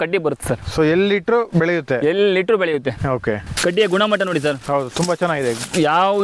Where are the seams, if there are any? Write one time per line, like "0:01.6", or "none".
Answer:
0:03.5

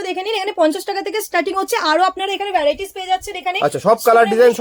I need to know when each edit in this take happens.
none

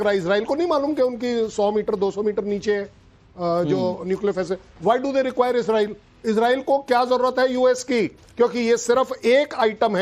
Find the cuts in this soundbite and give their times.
0:04.6

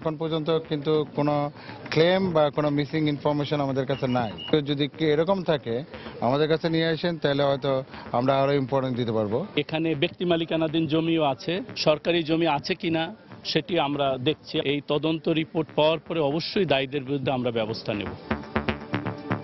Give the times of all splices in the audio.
0:04.5
0:09.5
0:14.6
0:18.4

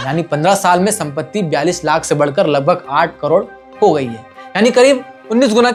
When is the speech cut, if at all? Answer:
none

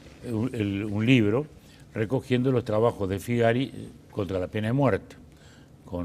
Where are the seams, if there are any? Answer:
0:04.8

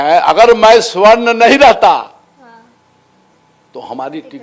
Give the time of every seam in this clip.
none

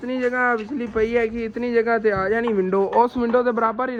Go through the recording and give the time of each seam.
none

